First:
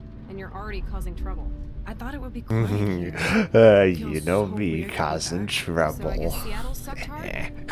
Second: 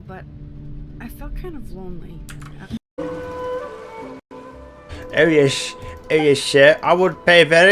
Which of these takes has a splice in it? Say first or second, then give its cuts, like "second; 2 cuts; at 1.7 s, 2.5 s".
second; 2 cuts; at 2.9 s, 4.3 s